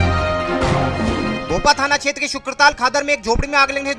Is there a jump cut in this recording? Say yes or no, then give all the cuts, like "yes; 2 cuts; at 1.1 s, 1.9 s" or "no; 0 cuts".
yes; 1 cut; at 1.4 s